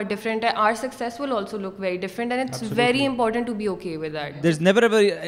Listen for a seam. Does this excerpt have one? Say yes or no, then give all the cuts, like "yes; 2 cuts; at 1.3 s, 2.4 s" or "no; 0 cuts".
yes; 1 cut; at 4.1 s